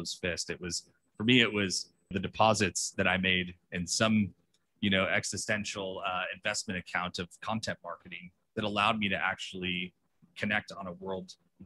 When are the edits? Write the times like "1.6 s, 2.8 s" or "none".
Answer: 2.2 s